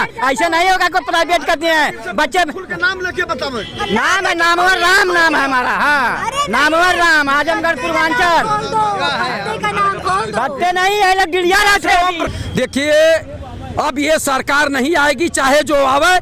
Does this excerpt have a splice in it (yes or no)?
yes